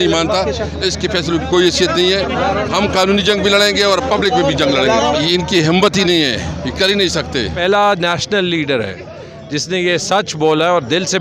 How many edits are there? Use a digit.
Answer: 2